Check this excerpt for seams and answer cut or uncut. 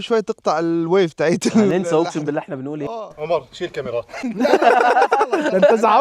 uncut